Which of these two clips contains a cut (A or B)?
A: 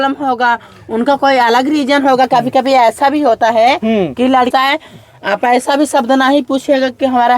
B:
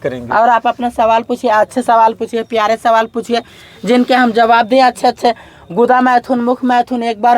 A